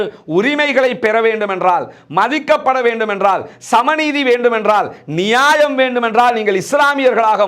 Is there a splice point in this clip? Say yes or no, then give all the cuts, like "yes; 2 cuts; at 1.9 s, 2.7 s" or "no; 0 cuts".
no; 0 cuts